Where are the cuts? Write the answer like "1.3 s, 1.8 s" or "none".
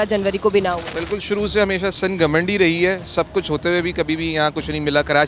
none